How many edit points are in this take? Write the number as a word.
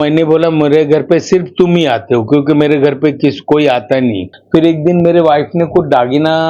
one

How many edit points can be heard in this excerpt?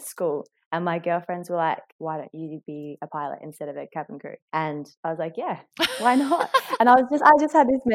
one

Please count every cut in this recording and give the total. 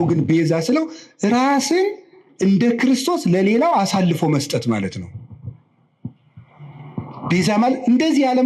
zero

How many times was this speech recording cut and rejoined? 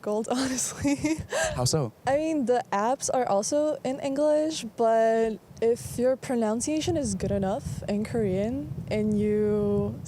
zero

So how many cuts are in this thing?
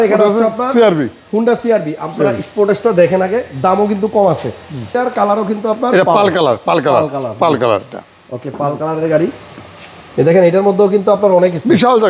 one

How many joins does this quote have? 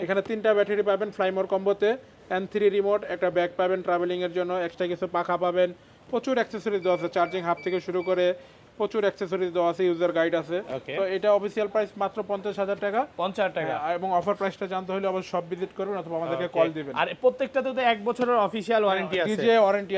zero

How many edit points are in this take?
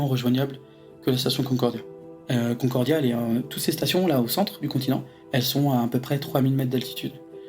two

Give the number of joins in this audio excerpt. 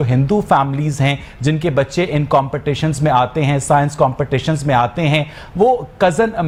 zero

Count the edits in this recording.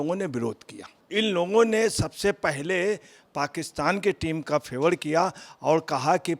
one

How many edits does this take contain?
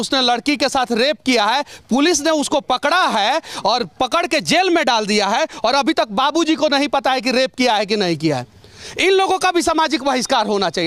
zero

